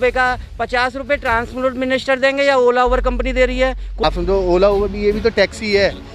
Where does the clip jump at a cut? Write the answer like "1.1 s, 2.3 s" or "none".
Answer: 4.0 s